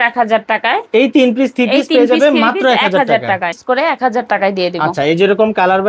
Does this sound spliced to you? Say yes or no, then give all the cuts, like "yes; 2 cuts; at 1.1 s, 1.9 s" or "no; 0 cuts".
no; 0 cuts